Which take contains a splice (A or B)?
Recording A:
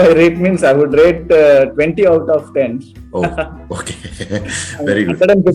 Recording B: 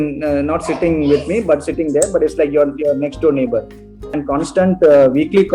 B